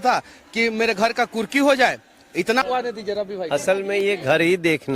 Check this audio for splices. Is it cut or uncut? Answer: cut